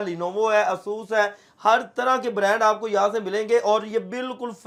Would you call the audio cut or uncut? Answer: uncut